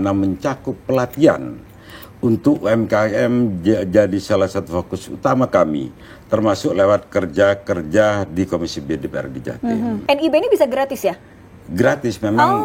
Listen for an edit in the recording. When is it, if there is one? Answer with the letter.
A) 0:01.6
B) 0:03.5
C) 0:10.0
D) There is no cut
C